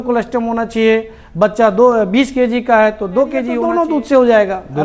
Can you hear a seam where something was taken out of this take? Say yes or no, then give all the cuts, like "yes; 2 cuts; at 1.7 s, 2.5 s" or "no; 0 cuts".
yes; 1 cut; at 3.6 s